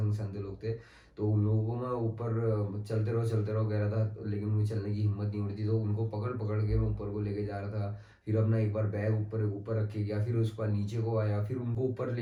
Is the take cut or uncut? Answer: uncut